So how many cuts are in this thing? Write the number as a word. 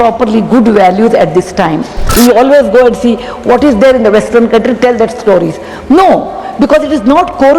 one